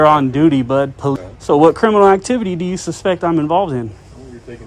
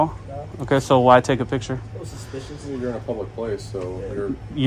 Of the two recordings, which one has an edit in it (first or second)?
first